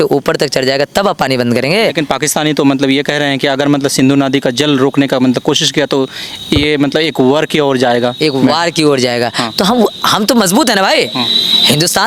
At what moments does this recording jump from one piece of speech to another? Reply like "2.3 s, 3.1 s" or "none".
none